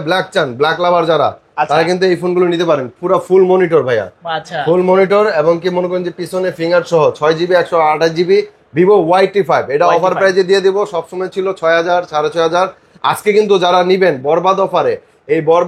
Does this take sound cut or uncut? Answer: uncut